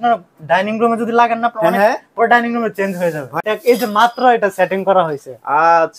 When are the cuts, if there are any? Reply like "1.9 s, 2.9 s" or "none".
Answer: 3.2 s